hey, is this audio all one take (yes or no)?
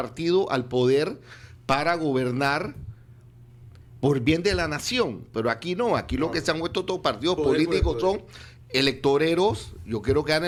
yes